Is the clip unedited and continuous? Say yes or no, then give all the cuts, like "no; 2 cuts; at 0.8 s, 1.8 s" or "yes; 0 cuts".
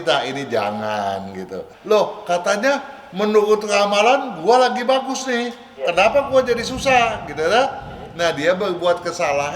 no; 1 cut; at 1.7 s